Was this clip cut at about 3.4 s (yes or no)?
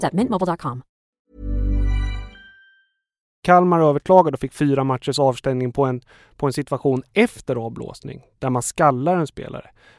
yes